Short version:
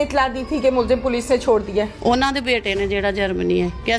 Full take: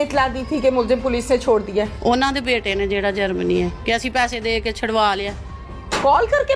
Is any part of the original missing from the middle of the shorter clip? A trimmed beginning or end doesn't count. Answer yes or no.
no